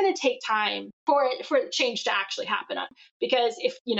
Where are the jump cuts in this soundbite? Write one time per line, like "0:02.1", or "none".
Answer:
0:00.9
0:02.9